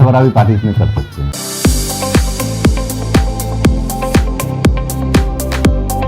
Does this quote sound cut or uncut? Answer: cut